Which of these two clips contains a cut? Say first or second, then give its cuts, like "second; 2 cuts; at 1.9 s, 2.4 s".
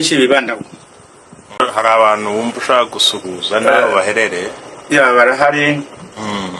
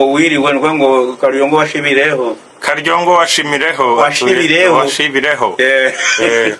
first; 1 cut; at 1.7 s